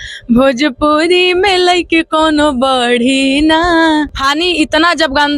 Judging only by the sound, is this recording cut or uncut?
cut